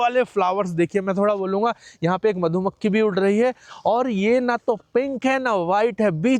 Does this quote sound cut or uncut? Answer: uncut